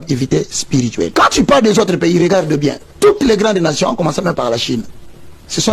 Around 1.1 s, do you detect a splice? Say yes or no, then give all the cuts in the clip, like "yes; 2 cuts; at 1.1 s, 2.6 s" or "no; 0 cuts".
yes; 1 cut; at 1.1 s